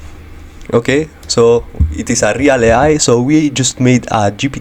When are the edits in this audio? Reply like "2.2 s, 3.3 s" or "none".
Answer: none